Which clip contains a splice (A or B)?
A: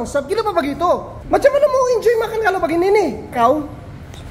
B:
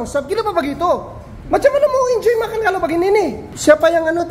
A